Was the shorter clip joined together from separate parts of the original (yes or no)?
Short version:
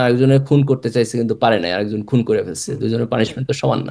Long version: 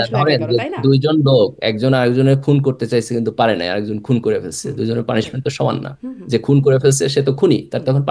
no